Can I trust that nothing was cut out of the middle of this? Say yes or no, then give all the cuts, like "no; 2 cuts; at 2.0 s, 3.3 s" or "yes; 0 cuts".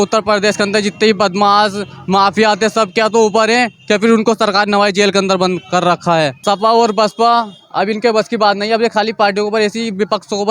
no; 1 cut; at 6.4 s